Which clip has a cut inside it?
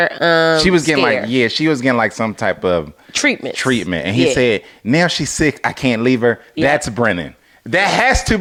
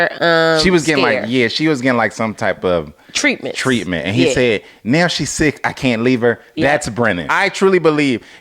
second; 1 cut; at 7.3 s

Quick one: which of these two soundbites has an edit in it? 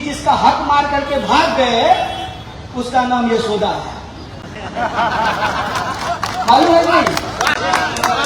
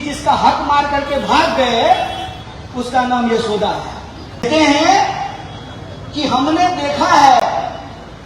second; 1 cut; at 4.5 s

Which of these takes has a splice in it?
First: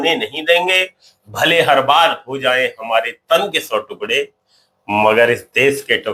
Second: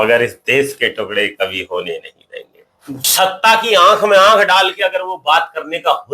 second; 1 cut; at 3.0 s

